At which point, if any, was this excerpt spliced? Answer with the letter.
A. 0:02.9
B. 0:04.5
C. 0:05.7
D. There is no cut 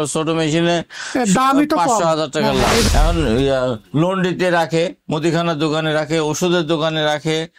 A